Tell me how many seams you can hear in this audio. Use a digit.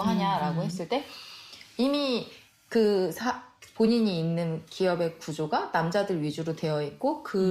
0